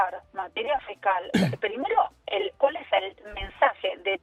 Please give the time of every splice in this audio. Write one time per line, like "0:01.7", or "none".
none

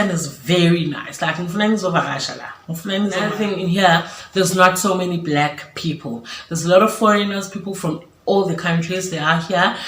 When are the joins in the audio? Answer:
0:03.3

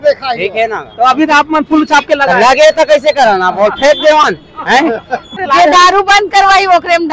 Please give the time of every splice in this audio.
0:05.3

